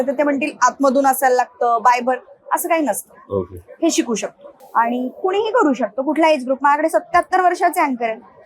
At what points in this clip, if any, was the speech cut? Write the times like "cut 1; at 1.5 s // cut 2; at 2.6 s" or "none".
cut 1; at 4.6 s